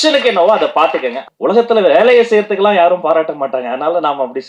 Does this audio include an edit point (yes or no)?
yes